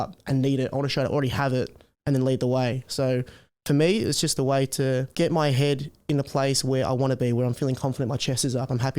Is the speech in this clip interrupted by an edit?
yes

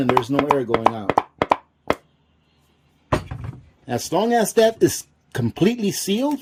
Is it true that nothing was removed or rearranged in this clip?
yes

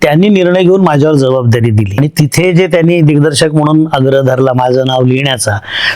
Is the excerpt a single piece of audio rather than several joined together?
no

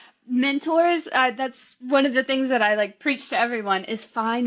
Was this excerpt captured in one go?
yes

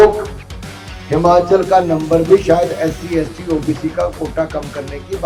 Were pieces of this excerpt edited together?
no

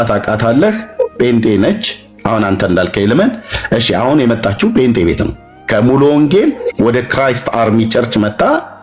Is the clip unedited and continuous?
yes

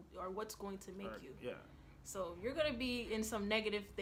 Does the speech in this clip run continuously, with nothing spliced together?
yes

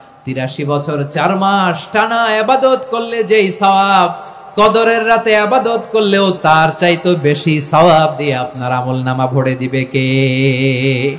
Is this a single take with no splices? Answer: no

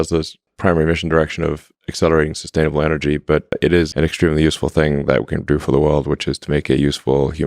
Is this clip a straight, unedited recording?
no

